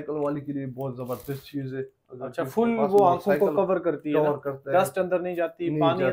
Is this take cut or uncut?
uncut